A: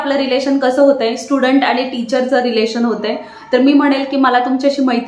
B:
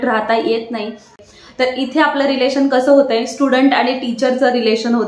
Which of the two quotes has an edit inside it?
B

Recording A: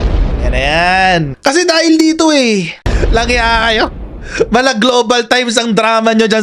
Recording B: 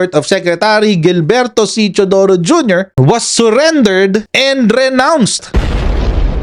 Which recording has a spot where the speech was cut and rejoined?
A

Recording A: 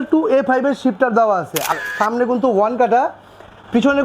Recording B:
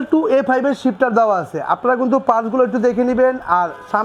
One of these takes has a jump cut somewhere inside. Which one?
A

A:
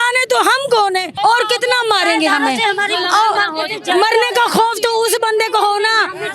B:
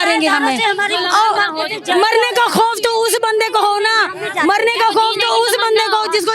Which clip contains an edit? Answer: A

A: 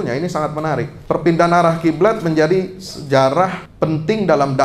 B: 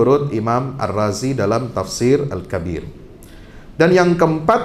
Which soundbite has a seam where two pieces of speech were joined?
A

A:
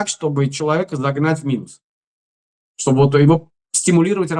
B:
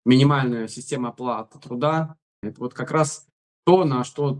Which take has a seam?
B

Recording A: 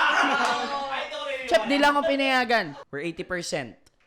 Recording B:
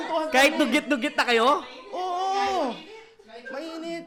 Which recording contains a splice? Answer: A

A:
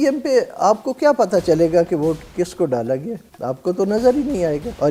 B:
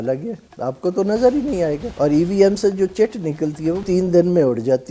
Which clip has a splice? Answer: B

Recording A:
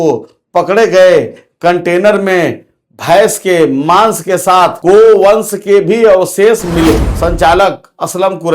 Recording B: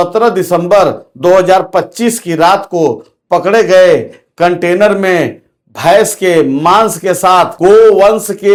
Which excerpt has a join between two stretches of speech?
A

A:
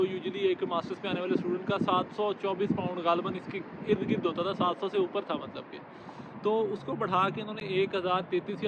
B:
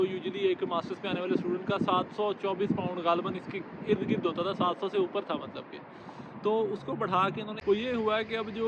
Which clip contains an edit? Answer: B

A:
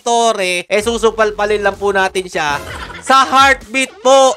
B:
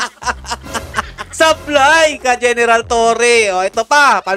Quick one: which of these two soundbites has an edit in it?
B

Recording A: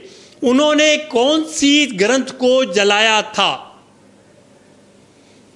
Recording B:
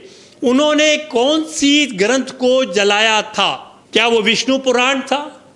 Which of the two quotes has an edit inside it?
B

